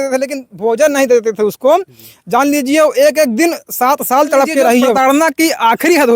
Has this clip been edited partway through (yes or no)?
yes